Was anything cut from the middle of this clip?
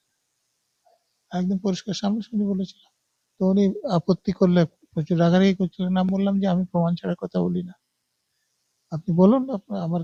no; 0 cuts

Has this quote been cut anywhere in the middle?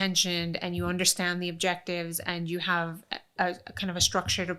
no; 0 cuts

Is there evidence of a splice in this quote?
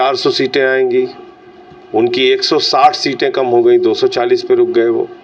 no; 0 cuts

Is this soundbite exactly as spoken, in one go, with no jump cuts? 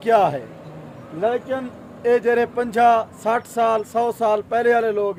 yes; 0 cuts

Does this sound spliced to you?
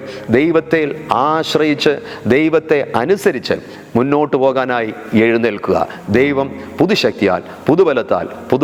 no; 0 cuts

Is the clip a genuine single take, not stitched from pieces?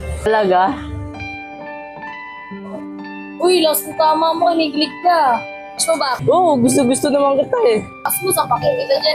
no; 1 cut; at 8.1 s

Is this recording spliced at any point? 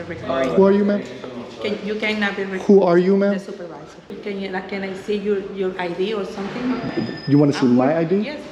yes; 1 cut; at 4.0 s

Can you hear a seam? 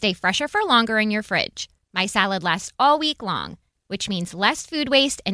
no; 0 cuts

